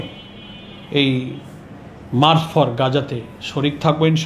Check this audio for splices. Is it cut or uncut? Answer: uncut